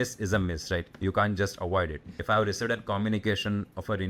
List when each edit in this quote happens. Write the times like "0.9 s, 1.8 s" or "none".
2.1 s